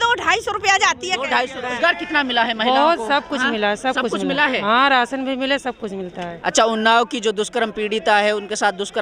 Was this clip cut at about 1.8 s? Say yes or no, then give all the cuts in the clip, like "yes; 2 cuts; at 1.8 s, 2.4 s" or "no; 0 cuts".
yes; 1 cut; at 1.8 s